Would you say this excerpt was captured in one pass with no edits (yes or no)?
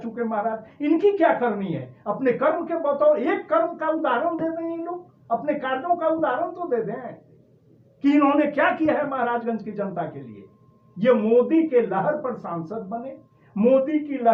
yes